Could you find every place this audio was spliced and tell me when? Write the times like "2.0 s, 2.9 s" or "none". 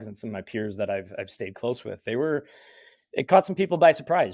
none